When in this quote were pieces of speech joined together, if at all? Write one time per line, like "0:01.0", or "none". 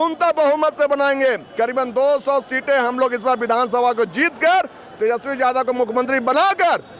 none